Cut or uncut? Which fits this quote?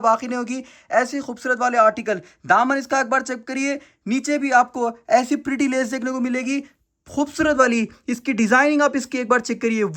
uncut